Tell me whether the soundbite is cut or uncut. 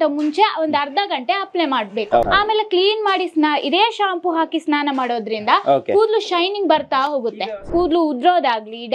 cut